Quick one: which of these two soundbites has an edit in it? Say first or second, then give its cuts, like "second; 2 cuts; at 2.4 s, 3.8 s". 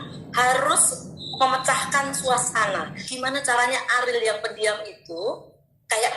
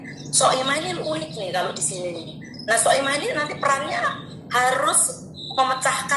first; 1 cut; at 3.0 s